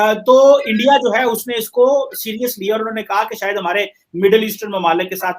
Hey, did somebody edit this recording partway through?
yes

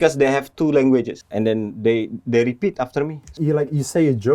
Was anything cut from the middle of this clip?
yes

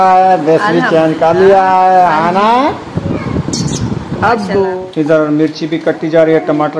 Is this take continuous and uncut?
no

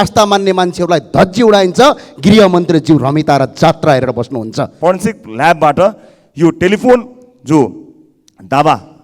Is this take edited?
yes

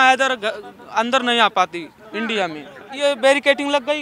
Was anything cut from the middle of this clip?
yes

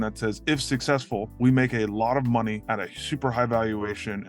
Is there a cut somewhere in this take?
yes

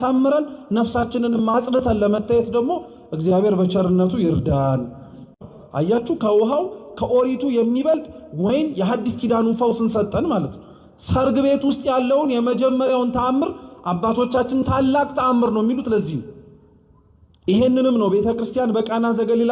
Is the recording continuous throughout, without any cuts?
no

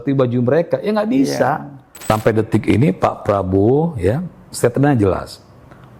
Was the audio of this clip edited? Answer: yes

